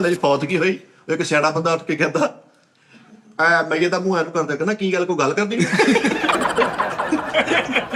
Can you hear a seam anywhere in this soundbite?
no; 0 cuts

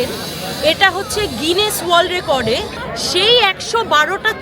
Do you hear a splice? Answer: yes; 1 cut; at 2.8 s

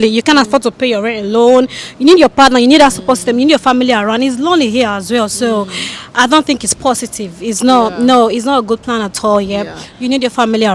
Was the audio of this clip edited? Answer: no; 0 cuts

